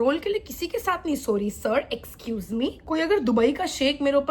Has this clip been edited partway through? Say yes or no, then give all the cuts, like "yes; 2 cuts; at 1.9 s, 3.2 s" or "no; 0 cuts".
no; 0 cuts